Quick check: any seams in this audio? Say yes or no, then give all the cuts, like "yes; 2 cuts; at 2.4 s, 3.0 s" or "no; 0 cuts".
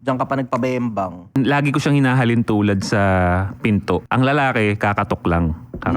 yes; 2 cuts; at 1.3 s, 4.1 s